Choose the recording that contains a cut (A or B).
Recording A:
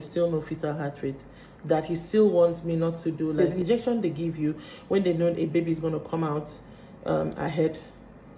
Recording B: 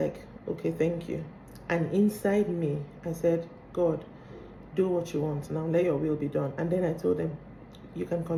A